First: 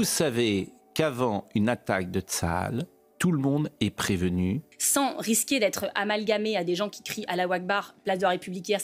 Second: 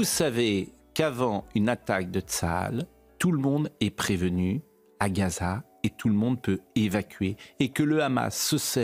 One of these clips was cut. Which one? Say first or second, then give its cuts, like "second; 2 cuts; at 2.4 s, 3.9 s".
first; 1 cut; at 4.7 s